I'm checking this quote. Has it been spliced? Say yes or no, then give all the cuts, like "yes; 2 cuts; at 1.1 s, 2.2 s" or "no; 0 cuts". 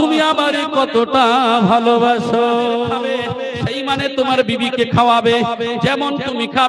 yes; 1 cut; at 3.2 s